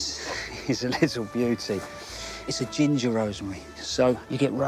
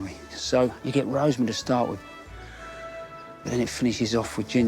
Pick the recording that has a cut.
first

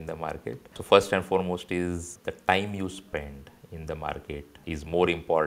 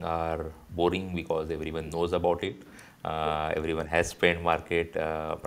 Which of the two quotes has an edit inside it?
first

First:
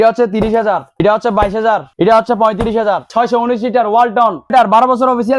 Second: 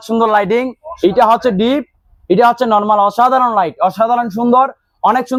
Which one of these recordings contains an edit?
first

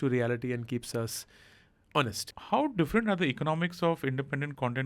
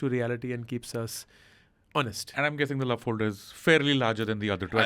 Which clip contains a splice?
first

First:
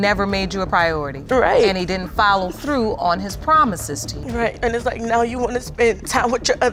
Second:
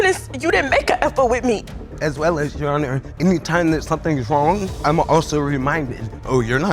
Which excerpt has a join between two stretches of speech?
second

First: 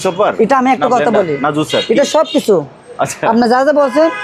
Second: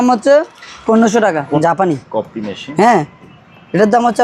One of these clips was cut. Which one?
second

